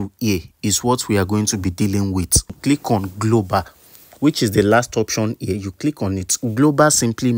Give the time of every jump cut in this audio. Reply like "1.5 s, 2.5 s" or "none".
2.6 s